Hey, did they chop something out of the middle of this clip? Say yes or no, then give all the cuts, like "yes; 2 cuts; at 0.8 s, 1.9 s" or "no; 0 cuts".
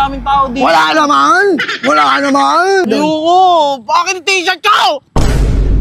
yes; 1 cut; at 2.9 s